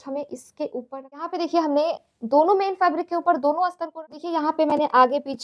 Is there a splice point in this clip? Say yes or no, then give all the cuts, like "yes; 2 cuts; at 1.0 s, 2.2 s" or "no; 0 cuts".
yes; 2 cuts; at 1.2 s, 3.8 s